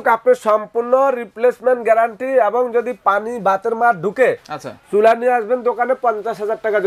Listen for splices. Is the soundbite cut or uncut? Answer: uncut